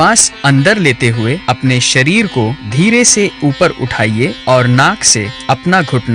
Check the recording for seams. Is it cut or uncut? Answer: cut